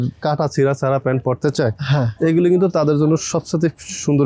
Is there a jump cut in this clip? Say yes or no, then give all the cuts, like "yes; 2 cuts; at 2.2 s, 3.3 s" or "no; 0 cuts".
no; 0 cuts